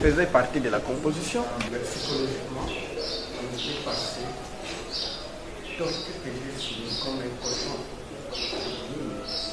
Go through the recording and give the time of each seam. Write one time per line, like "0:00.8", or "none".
0:01.7